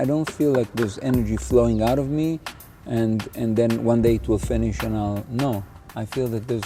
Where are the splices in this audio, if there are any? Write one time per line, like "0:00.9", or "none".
none